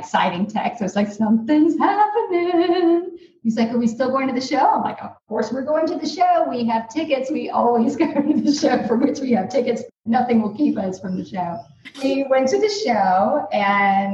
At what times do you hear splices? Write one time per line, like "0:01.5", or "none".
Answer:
0:12.0